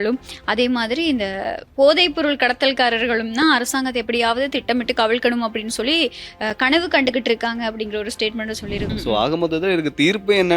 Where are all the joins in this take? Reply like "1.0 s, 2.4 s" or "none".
8.9 s